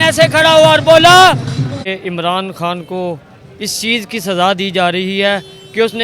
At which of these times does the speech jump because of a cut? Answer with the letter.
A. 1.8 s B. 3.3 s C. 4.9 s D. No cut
A